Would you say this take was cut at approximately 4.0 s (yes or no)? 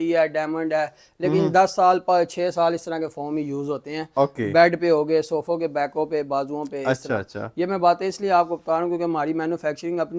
no